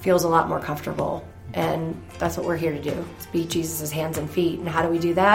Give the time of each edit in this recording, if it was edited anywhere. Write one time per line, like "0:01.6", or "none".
0:02.1